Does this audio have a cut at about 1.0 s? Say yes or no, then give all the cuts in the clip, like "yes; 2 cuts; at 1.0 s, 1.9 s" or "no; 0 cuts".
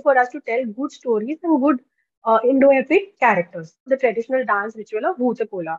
no; 1 cut; at 3.9 s